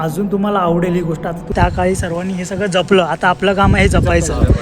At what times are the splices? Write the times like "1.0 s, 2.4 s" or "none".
1.5 s

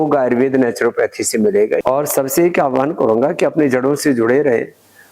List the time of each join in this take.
1.8 s

